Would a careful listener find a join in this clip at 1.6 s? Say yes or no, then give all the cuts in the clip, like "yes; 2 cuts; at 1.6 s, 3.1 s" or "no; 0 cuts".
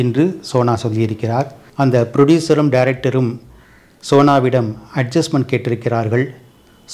yes; 1 cut; at 1.6 s